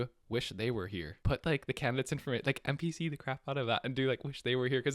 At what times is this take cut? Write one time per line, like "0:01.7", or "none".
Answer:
0:01.1